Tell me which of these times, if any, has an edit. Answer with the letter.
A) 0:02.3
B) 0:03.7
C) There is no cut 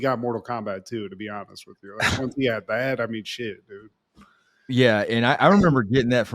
C